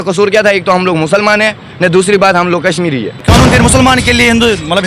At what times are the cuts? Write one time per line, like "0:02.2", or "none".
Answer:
0:03.3